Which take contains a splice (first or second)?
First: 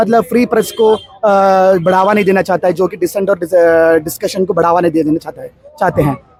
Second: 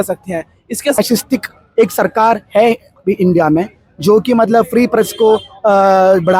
second